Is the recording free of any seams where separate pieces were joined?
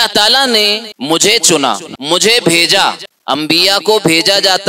no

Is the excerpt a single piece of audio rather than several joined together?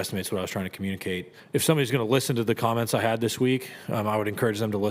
yes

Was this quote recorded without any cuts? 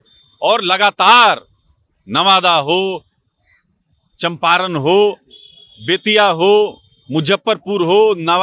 yes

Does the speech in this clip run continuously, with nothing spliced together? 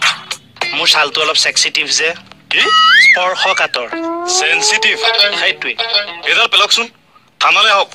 yes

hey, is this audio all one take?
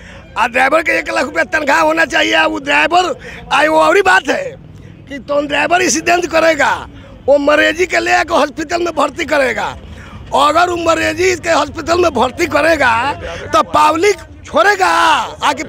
yes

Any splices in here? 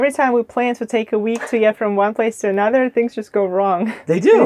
no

